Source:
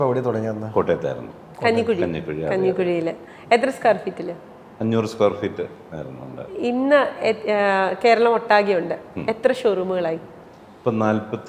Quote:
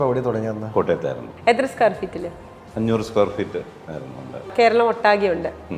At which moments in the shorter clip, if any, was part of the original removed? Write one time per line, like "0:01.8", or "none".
0:01.3
0:04.5